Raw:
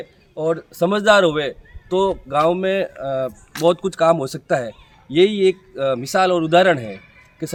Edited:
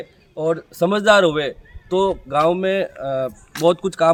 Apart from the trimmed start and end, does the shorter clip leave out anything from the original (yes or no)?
no